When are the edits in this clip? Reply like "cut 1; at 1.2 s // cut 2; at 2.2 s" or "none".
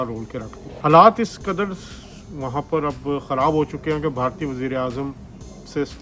none